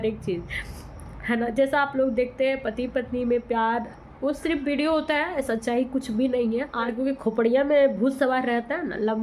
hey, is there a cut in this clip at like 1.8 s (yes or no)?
no